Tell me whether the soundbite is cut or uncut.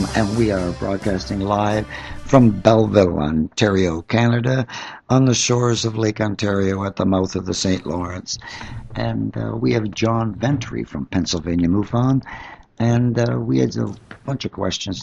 uncut